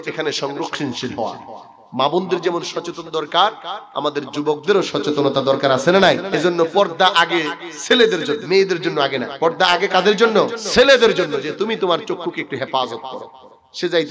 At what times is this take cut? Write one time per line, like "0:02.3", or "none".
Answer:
0:06.3
0:08.4
0:09.3
0:10.6